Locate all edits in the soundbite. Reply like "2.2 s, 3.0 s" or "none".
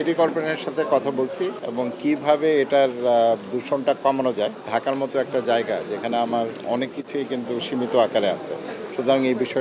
1.6 s, 4.6 s